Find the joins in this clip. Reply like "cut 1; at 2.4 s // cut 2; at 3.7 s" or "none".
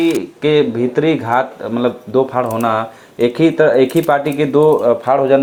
none